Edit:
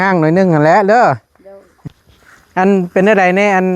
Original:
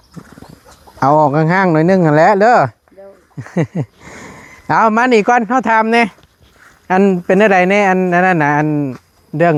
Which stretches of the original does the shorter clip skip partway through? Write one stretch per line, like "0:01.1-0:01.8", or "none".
0:03.4-0:06.2